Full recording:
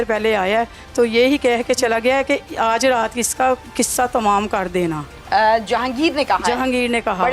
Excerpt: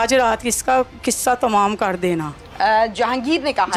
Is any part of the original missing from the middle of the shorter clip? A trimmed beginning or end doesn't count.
no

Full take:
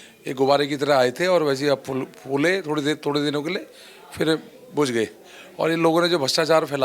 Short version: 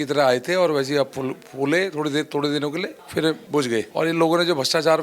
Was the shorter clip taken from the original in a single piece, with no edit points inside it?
no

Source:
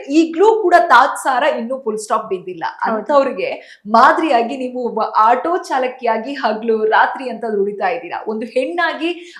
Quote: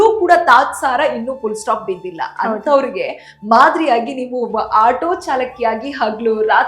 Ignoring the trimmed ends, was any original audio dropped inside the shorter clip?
no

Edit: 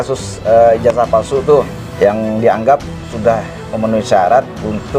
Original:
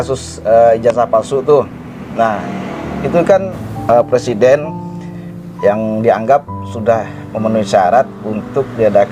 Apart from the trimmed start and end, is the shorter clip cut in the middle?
yes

